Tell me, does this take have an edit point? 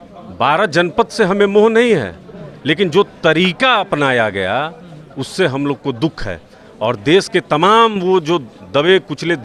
no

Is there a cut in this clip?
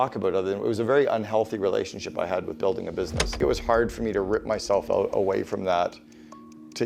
yes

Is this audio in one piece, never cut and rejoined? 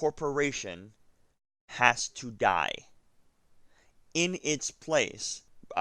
yes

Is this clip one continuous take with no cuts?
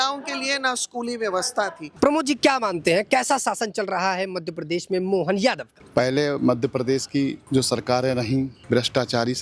no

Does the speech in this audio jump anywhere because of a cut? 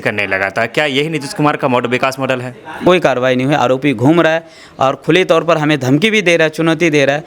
yes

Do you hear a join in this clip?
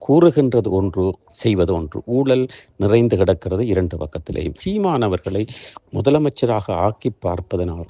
yes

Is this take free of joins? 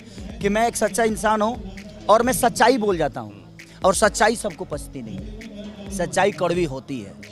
yes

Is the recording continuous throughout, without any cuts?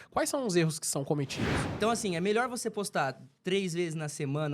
no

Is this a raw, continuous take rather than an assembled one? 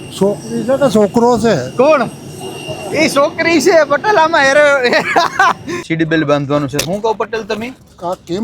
no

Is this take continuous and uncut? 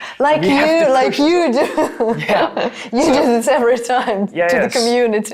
yes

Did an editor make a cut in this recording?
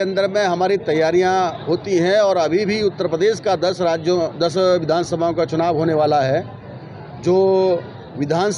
no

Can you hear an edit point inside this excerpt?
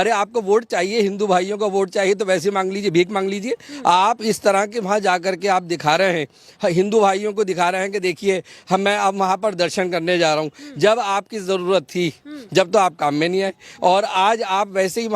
no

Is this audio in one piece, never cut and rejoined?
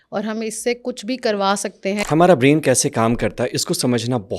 no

